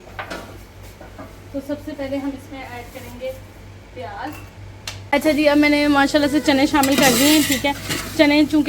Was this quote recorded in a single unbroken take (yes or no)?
no